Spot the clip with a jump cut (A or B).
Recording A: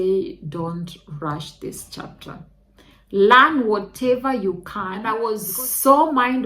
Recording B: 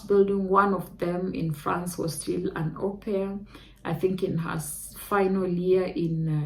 A